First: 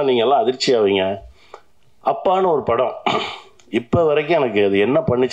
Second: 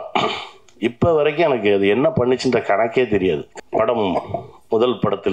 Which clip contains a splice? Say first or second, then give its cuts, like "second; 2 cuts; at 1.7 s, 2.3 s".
second; 1 cut; at 3.5 s